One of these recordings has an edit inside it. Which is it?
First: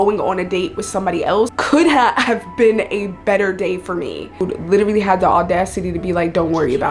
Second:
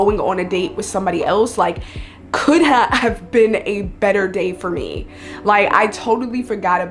first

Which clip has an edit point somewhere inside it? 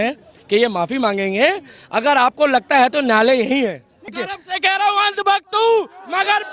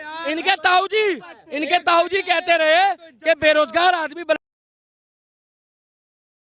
first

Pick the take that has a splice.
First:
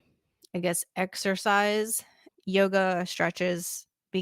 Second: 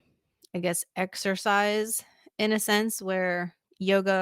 first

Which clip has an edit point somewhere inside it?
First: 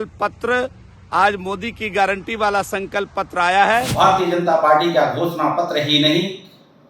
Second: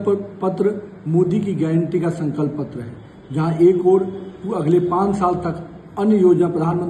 first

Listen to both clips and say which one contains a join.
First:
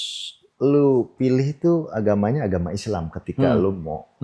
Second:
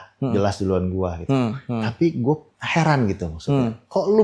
second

